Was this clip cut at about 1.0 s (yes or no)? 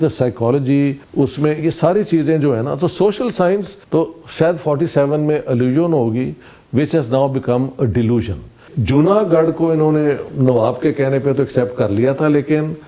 yes